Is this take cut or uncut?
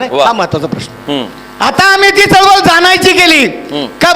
cut